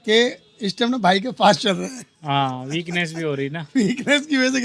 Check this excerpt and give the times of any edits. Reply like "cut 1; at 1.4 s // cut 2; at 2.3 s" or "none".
none